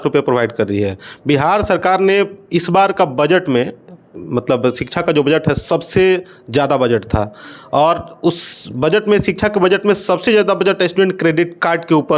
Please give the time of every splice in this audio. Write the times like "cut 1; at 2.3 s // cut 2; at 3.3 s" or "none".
none